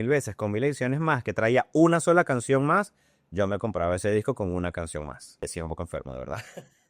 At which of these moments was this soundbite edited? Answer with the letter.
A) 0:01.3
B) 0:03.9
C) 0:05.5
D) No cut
C